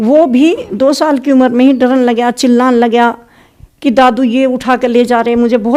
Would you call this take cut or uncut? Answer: uncut